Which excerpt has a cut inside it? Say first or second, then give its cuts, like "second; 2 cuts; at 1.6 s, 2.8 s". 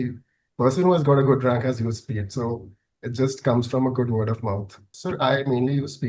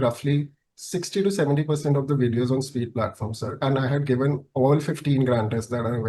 first; 1 cut; at 4.9 s